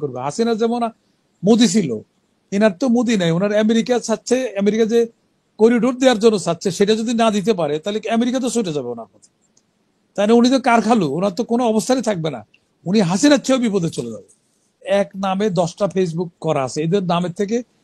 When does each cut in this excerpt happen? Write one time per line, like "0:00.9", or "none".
0:14.8